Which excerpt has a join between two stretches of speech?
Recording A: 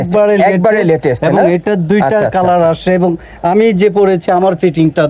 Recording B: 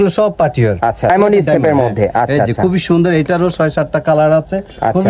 B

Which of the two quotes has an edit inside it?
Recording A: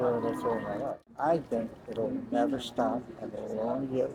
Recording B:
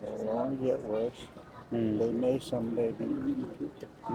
A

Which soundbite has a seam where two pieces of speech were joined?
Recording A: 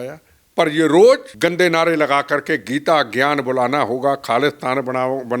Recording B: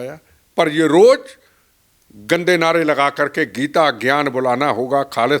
A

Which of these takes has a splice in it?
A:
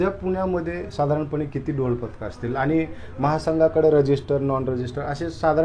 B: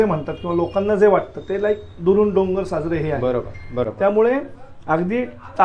B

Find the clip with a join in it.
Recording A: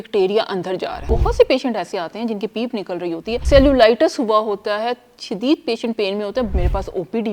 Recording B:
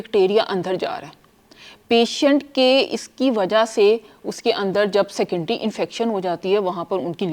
A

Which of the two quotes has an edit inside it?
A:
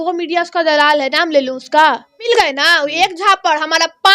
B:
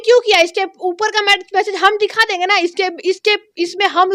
A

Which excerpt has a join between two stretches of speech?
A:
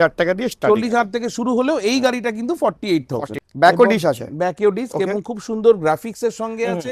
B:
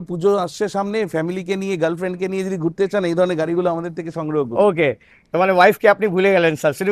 A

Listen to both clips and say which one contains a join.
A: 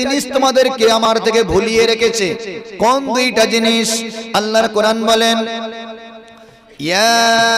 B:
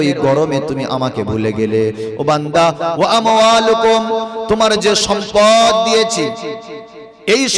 A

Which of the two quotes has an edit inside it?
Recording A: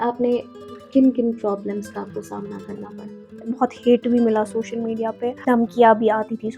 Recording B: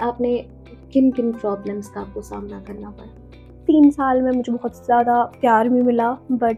A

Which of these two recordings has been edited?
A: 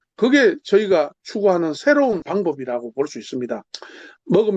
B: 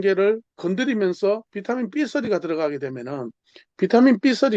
A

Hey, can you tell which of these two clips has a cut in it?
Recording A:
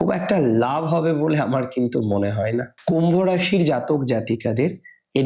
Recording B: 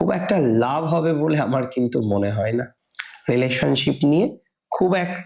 B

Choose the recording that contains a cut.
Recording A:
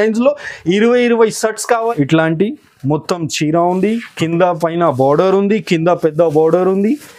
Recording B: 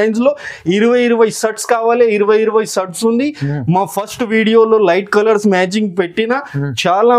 A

